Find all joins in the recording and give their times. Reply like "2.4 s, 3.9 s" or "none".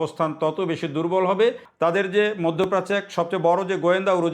1.7 s